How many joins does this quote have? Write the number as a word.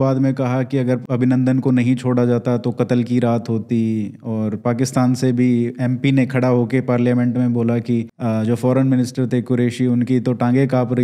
two